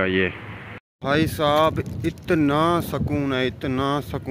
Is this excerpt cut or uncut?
cut